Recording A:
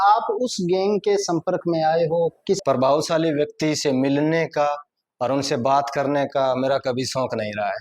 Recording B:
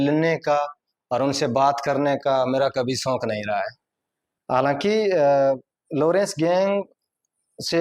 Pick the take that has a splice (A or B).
A